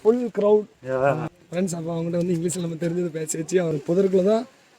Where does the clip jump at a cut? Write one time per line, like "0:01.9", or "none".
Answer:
0:01.3
0:03.7